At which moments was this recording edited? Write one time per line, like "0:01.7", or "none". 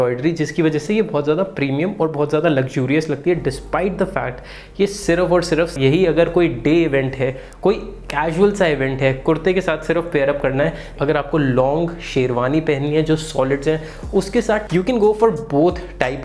0:05.7
0:10.9
0:14.6